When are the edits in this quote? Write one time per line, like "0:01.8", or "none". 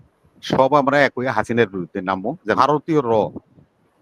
0:02.6